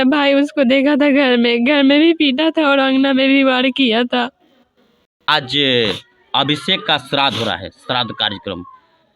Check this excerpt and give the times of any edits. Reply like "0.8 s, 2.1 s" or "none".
5.3 s

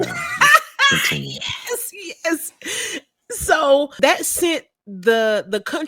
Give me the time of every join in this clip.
3.9 s

